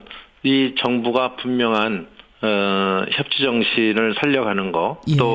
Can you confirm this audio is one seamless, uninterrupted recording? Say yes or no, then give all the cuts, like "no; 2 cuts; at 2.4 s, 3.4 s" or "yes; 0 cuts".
no; 1 cut; at 1.6 s